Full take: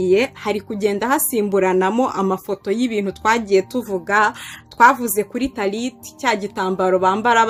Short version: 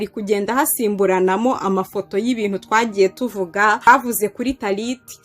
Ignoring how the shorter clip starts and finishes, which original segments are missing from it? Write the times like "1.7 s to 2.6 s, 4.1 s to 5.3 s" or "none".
4.3 s to 4.8 s